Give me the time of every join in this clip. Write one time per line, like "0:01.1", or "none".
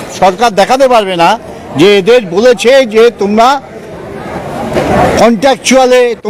none